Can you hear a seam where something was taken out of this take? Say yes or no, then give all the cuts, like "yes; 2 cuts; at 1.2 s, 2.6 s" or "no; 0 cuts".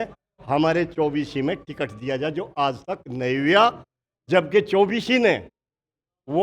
no; 0 cuts